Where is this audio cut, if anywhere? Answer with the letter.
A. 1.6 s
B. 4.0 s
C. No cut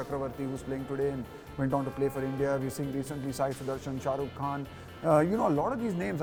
C